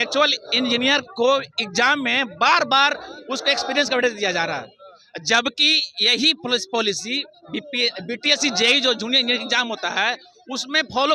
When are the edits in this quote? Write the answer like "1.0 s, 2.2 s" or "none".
none